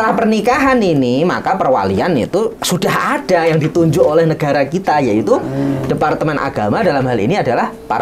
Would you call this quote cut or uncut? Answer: uncut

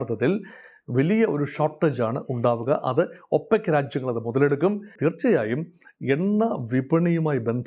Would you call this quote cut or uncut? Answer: cut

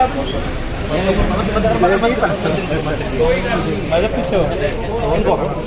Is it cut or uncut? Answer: uncut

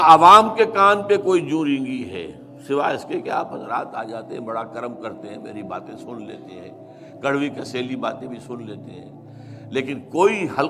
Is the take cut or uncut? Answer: uncut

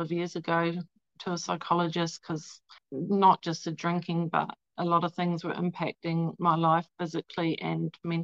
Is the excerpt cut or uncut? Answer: cut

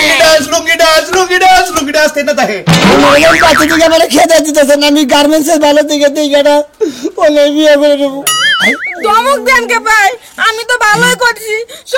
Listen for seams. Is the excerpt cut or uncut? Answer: cut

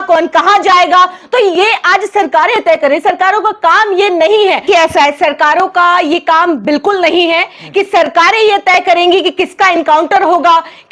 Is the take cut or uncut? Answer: cut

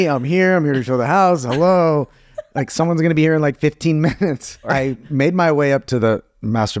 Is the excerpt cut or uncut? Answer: cut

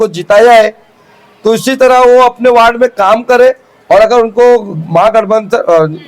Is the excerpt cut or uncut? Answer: uncut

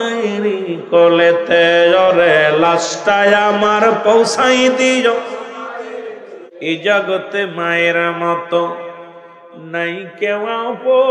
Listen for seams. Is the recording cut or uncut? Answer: cut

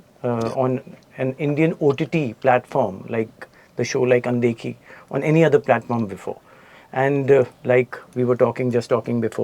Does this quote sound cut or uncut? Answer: uncut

